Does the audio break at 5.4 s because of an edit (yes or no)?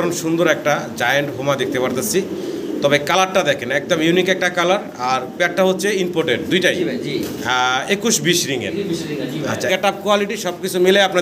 no